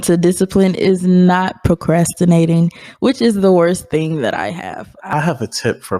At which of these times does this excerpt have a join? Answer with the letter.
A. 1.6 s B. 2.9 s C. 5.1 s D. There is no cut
C